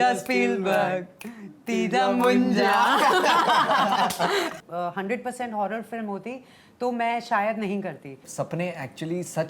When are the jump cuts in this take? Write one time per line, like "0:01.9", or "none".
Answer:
0:04.5
0:08.2